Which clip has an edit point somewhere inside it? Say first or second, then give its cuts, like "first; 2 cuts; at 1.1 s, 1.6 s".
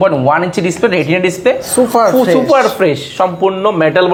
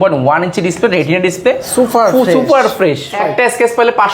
second; 1 cut; at 3.1 s